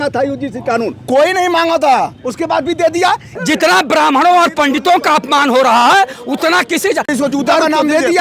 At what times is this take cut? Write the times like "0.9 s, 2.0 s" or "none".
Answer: 3.3 s, 7.1 s